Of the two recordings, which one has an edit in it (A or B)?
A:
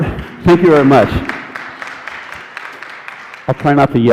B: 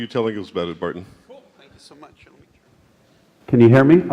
B